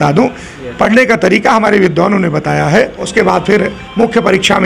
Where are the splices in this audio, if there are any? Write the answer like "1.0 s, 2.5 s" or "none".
3.0 s